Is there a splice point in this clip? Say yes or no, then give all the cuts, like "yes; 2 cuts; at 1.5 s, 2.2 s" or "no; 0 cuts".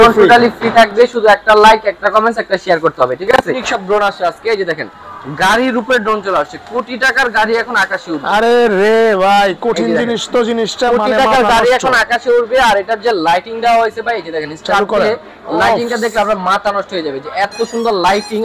yes; 1 cut; at 3.6 s